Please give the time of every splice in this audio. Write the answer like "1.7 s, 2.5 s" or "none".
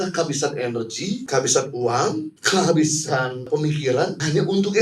1.2 s, 2.3 s, 3.8 s